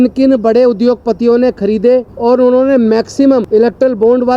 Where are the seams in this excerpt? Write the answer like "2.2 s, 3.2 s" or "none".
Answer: 2.1 s, 3.4 s